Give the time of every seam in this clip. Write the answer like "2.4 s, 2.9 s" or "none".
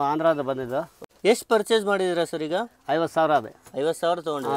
1.0 s